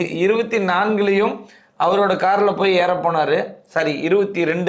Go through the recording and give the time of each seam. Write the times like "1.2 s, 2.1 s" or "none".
none